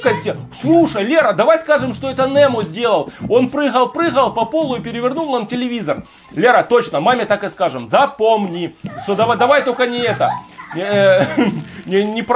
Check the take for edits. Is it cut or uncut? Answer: uncut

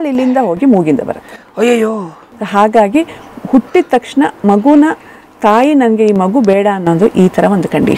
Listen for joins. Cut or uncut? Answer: uncut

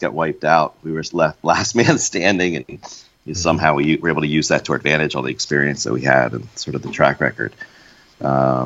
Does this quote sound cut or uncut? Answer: uncut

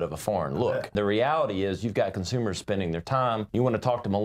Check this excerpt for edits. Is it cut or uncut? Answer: cut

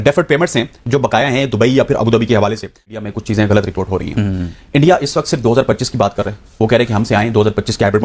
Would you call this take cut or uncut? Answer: cut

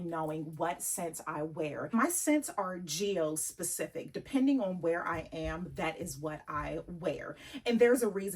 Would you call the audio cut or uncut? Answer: cut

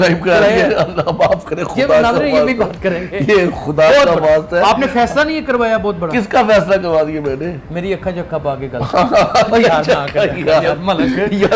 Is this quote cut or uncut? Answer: uncut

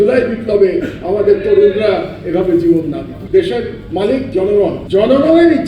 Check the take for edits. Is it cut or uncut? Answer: cut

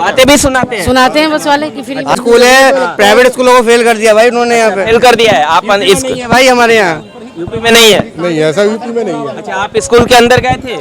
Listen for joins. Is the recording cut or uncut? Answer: cut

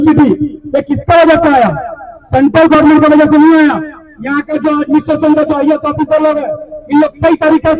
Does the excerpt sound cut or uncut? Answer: uncut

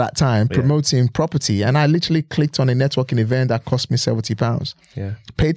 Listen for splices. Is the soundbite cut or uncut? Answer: uncut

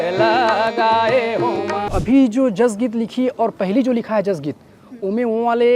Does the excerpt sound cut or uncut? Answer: cut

